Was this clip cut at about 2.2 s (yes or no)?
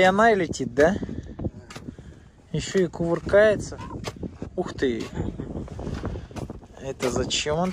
no